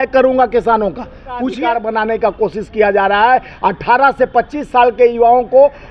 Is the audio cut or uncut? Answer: cut